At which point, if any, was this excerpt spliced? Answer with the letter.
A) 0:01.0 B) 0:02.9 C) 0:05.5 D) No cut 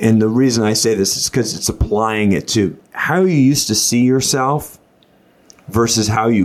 B